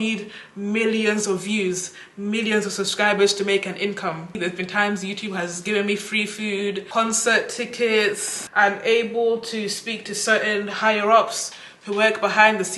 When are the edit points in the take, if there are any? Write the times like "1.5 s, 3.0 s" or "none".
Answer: 4.4 s, 6.9 s, 8.3 s